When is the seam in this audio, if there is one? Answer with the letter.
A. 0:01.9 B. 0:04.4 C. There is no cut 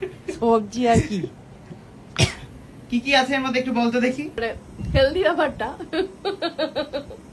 B